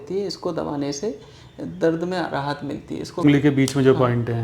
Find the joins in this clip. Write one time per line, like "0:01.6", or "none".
0:03.2